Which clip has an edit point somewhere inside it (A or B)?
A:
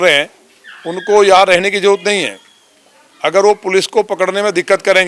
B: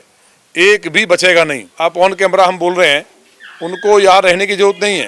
B